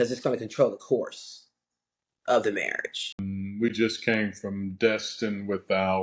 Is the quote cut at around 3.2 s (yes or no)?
yes